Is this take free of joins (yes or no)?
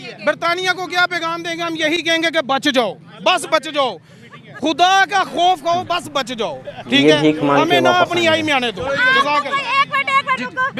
yes